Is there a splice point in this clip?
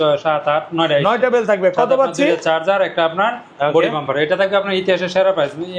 no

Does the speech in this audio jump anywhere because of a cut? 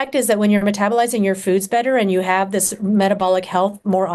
no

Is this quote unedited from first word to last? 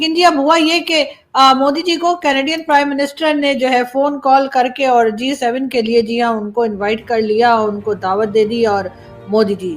yes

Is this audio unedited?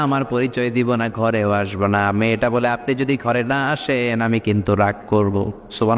yes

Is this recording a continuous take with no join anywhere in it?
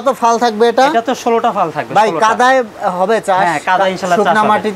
yes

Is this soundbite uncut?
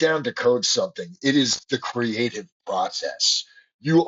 yes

